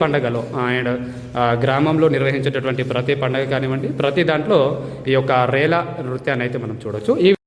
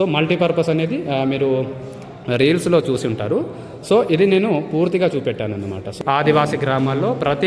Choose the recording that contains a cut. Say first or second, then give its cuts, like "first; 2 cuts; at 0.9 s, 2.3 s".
second; 1 cut; at 5.9 s